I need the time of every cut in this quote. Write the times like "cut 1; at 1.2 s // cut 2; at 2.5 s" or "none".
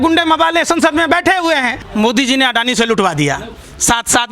cut 1; at 1.8 s